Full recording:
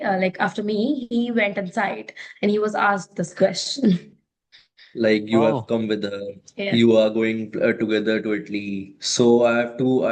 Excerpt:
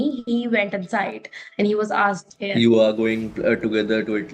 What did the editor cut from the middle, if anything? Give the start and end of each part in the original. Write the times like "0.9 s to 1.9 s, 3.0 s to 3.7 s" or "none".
3.1 s to 6.5 s

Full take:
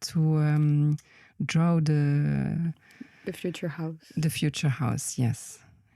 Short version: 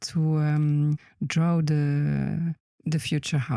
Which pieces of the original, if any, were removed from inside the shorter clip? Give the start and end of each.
1.1 s to 1.3 s, 2.9 s to 4.0 s

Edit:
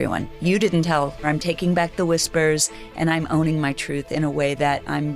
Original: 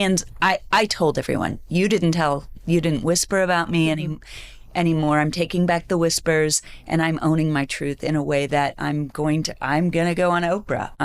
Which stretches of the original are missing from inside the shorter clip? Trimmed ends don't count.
2.5 s to 5.2 s

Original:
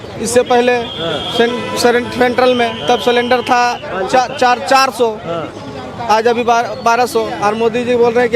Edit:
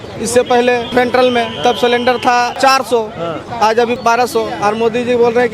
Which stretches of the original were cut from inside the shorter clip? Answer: 0.9 s to 2.1 s, 3.8 s to 4.6 s, 6.0 s to 6.7 s

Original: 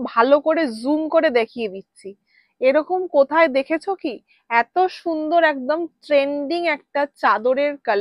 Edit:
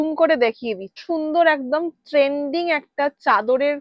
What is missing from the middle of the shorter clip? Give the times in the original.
2.0 s to 5.0 s

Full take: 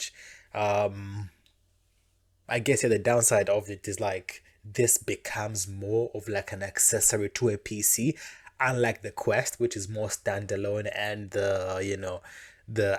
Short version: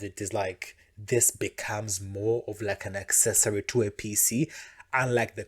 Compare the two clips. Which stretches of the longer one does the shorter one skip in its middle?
none

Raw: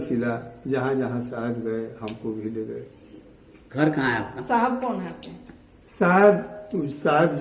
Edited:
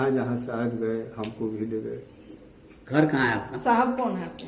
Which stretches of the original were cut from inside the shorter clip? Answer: none

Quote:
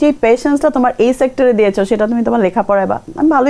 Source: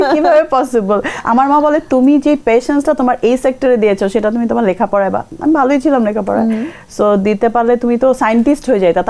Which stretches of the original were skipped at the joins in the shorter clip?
none

